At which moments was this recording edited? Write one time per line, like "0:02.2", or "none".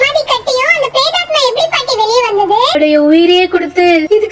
0:02.8